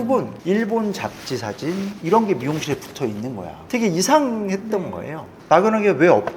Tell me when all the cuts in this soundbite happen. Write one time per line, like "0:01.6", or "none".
0:02.0
0:03.5